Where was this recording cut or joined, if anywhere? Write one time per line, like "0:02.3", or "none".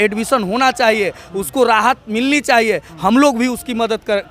none